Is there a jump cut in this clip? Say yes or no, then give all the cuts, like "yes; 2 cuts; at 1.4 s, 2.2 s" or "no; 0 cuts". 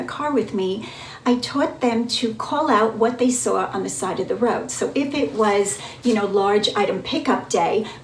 no; 0 cuts